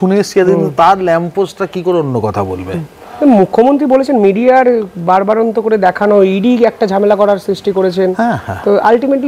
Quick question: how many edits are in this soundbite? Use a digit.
0